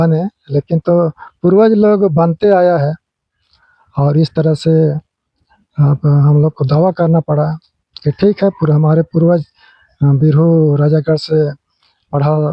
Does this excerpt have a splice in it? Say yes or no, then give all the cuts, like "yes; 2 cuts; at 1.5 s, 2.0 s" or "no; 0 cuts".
no; 0 cuts